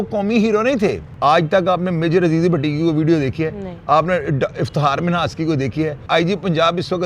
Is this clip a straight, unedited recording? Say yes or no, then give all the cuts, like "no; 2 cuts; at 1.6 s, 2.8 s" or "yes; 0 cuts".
no; 2 cuts; at 1.1 s, 6.0 s